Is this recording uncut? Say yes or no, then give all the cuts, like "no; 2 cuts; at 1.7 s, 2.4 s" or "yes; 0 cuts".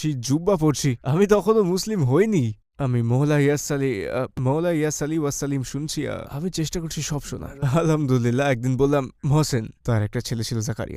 yes; 0 cuts